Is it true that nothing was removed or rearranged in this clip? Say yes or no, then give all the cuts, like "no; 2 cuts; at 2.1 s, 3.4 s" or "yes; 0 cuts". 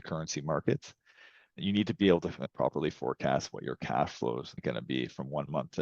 no; 1 cut; at 2.5 s